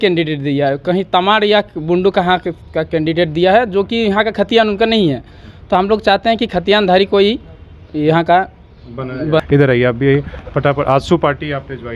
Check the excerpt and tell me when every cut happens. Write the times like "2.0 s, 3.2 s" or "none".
none